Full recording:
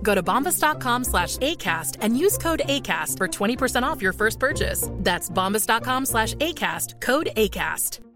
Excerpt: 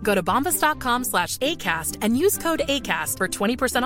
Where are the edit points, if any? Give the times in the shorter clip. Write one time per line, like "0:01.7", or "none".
none